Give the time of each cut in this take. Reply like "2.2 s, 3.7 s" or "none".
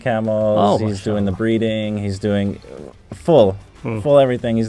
none